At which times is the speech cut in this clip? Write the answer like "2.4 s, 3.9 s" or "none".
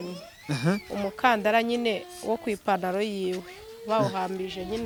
none